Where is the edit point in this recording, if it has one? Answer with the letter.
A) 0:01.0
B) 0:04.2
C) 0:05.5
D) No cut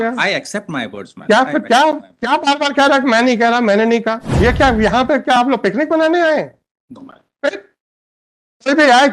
B